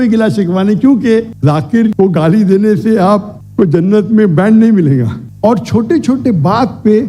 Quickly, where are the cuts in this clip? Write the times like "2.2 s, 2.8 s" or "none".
1.3 s, 5.2 s